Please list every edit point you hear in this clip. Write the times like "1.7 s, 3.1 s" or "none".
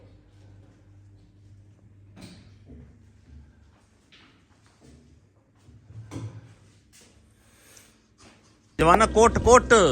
8.6 s